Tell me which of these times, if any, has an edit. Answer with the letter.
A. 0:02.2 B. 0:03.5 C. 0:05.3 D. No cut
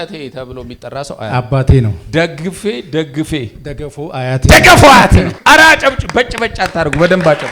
C